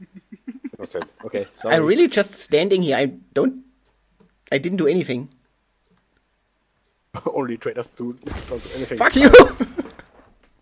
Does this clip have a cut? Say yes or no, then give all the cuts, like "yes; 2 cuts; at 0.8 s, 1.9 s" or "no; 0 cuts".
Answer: yes; 1 cut; at 2.7 s